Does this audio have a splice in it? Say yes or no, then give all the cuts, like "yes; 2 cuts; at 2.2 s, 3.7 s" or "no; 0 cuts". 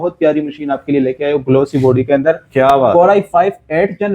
no; 0 cuts